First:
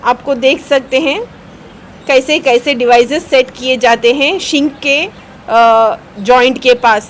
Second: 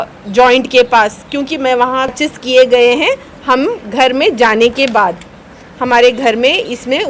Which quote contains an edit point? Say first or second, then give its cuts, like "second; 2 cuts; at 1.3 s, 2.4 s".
second; 1 cut; at 2.1 s